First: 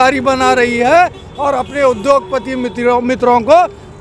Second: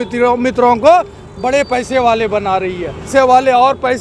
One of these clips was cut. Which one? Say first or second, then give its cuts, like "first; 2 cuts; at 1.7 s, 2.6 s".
second; 1 cut; at 3.1 s